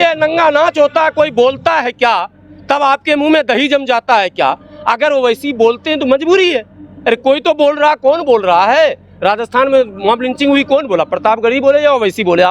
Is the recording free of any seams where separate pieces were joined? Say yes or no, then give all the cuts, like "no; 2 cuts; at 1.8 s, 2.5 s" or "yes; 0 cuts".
yes; 0 cuts